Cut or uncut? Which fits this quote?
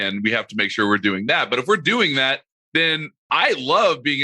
cut